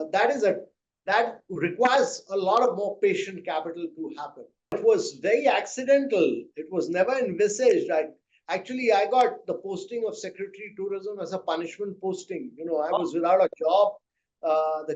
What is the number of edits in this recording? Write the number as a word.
one